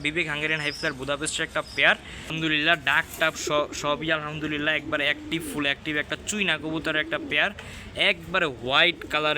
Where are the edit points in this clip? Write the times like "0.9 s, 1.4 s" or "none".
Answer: 2.2 s